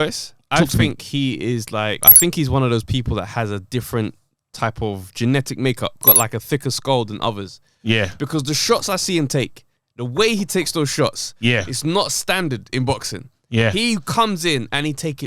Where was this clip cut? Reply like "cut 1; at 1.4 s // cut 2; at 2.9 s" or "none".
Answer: cut 1; at 2.1 s // cut 2; at 6.0 s